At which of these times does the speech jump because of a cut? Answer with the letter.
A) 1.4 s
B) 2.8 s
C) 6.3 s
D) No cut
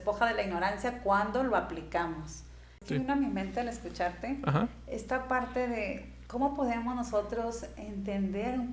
B